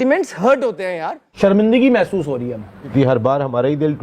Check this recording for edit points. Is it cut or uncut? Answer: cut